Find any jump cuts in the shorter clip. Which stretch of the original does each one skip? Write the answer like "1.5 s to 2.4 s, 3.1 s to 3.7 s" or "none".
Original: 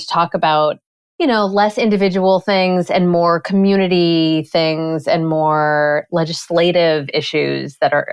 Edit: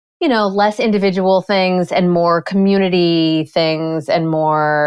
none